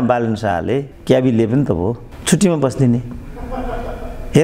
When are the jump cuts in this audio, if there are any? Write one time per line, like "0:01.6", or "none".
0:00.9
0:02.1